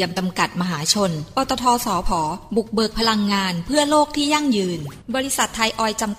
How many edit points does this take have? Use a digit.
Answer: 1